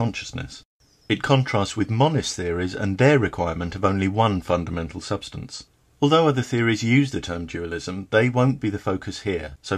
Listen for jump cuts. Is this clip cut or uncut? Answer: uncut